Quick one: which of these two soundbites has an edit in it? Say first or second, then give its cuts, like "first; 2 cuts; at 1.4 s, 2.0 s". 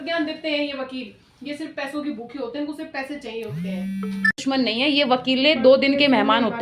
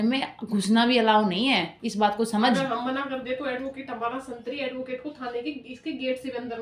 first; 1 cut; at 4.8 s